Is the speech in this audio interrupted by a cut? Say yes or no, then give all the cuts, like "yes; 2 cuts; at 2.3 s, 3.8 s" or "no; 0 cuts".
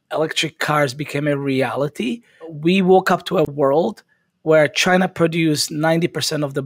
no; 0 cuts